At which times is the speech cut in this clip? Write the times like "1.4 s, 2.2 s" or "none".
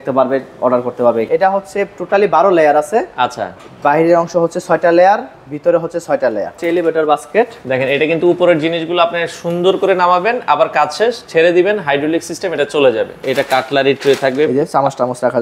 1.3 s, 6.6 s, 13.2 s